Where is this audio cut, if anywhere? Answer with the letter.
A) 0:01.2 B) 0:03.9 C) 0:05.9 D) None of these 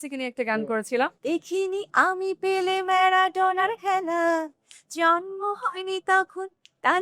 A